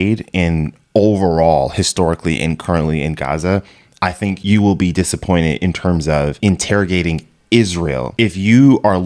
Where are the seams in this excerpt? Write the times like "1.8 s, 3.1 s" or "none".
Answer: 6.4 s, 8.1 s